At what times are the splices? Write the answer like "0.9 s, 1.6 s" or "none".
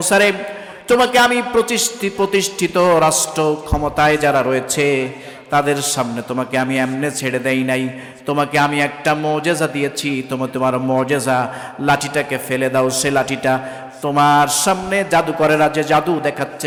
none